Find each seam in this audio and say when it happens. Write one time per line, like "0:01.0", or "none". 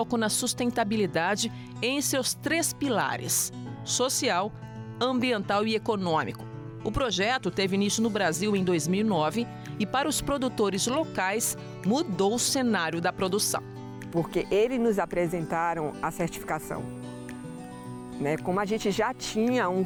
none